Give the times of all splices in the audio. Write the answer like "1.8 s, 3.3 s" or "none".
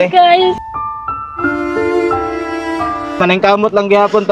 3.2 s